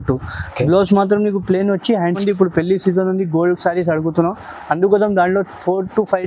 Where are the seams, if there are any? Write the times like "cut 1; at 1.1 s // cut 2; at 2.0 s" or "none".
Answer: cut 1; at 2.2 s